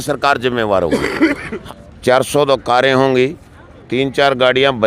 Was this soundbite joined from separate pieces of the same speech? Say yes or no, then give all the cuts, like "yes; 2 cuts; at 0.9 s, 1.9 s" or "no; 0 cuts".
yes; 1 cut; at 1.5 s